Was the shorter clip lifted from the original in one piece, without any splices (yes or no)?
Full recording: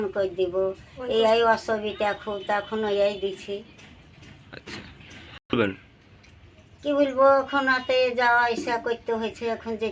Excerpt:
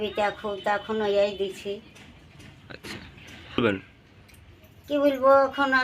no